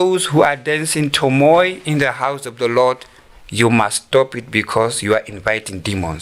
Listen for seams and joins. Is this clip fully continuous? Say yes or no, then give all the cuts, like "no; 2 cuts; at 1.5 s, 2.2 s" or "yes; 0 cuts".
yes; 0 cuts